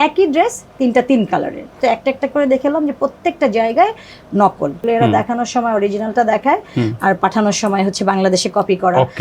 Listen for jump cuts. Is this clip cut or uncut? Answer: cut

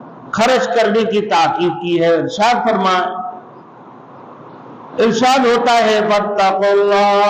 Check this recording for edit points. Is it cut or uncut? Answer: uncut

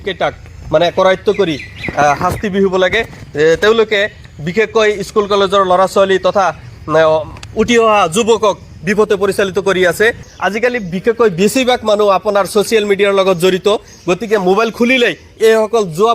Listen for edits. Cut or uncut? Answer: cut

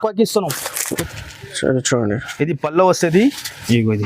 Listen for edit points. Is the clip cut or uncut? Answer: cut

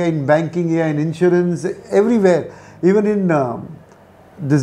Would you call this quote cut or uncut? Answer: uncut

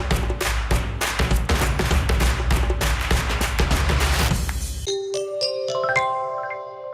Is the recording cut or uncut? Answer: cut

